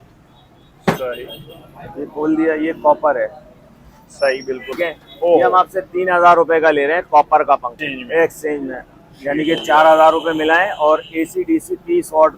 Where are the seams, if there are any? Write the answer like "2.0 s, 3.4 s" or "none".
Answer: 4.8 s, 7.8 s